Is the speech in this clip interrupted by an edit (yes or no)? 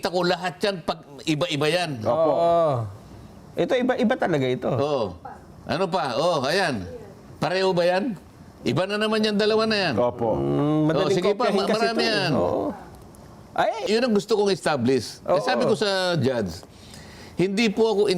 yes